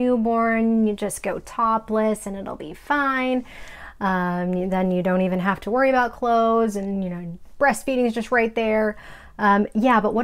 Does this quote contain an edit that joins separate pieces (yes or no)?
no